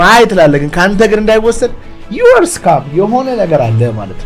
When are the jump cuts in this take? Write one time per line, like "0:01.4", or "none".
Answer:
none